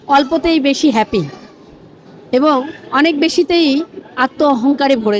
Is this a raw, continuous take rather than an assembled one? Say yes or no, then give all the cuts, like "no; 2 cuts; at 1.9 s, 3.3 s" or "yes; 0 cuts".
yes; 0 cuts